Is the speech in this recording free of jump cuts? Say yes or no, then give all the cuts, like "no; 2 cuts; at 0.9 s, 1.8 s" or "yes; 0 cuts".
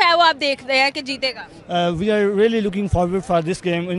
yes; 0 cuts